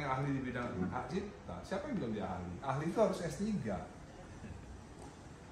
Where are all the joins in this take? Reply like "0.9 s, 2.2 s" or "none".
none